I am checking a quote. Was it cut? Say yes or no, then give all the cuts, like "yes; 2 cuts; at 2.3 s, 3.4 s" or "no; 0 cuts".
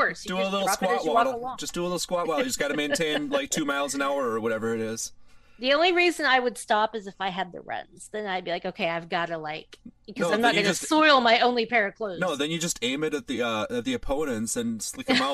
no; 0 cuts